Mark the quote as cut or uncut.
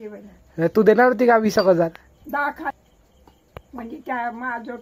cut